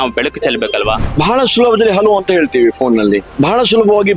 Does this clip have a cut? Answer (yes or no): yes